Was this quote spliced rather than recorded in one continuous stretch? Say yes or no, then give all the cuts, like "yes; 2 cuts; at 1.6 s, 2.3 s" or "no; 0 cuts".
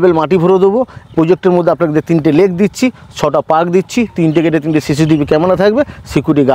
no; 0 cuts